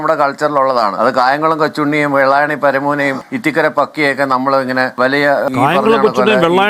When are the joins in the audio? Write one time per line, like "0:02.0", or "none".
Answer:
0:00.9